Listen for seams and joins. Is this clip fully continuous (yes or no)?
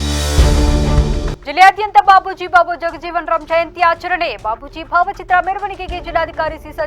no